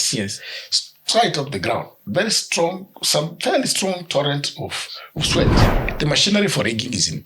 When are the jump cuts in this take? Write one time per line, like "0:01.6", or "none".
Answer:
0:05.6